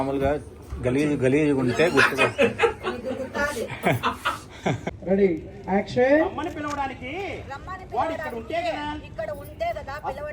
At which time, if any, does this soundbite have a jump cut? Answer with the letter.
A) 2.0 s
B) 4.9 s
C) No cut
B